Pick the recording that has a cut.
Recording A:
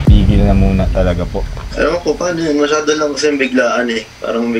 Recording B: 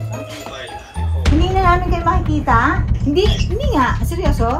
B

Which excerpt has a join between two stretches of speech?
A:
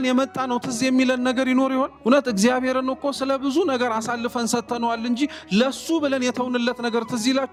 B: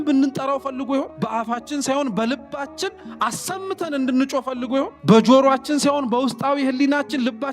B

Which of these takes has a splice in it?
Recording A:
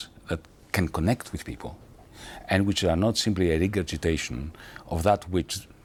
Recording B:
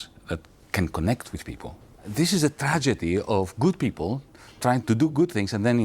B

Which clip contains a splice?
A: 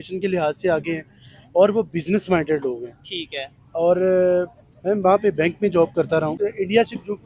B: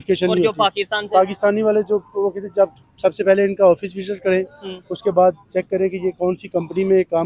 A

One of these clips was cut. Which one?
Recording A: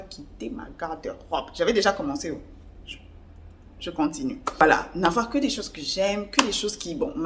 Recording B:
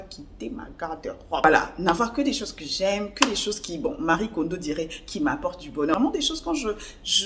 B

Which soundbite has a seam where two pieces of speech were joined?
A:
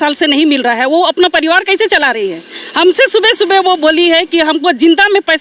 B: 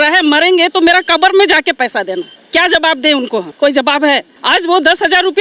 B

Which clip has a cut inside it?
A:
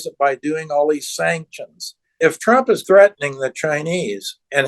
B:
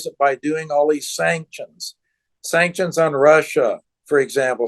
A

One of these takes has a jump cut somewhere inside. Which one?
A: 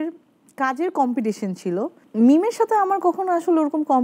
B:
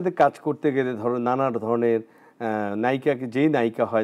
A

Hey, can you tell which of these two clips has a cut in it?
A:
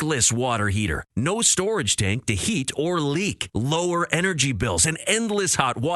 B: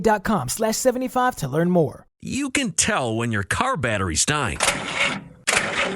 B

